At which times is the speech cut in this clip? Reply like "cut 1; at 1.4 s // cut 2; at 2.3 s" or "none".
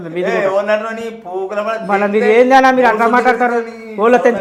none